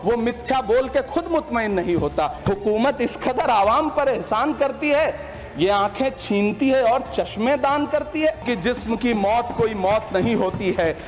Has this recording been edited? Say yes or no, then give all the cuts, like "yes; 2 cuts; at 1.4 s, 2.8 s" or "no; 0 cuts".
yes; 2 cuts; at 2.4 s, 8.4 s